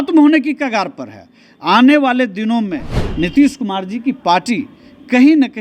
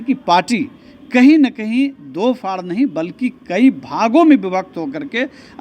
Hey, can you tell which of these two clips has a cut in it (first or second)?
first